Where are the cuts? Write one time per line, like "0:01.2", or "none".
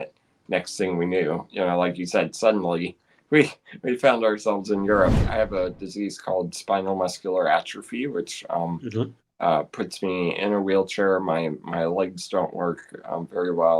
0:05.2